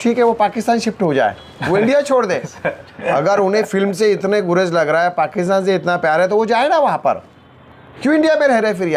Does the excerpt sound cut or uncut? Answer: uncut